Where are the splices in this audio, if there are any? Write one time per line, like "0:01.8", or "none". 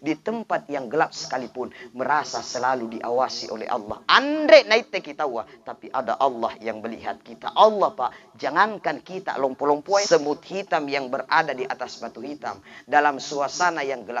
0:10.1